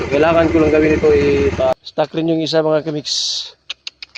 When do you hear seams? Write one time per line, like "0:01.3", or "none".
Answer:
0:01.7